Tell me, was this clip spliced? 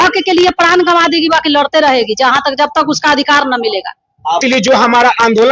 yes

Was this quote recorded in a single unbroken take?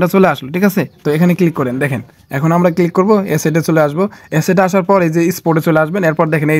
yes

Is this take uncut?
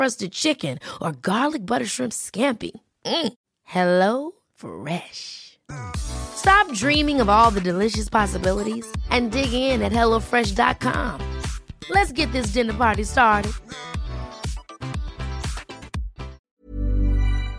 no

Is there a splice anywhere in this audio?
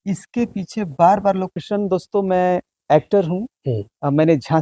yes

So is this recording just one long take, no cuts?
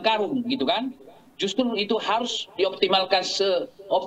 yes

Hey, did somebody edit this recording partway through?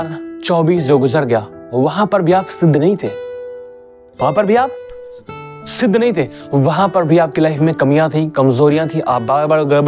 no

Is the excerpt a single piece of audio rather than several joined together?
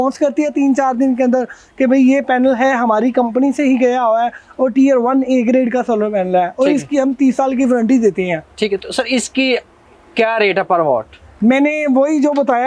yes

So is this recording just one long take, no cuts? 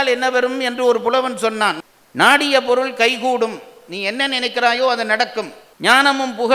yes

